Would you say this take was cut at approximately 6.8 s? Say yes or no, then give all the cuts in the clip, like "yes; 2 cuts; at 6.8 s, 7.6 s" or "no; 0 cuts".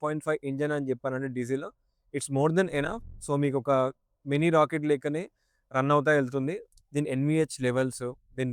yes; 1 cut; at 6.8 s